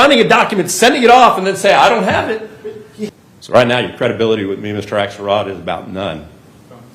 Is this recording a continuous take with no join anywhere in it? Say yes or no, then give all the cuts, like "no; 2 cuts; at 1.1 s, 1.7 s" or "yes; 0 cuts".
no; 1 cut; at 3.1 s